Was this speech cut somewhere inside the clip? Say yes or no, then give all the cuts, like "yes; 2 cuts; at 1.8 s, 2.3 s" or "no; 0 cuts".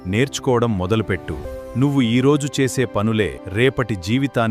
yes; 2 cuts; at 1.5 s, 3.4 s